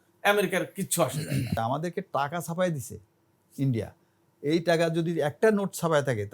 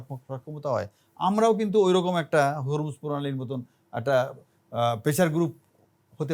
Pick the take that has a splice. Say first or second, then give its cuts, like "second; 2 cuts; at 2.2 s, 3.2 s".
first; 2 cuts; at 1.6 s, 5.3 s